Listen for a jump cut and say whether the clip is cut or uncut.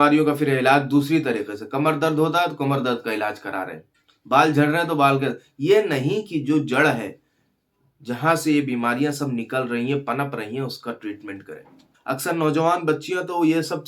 cut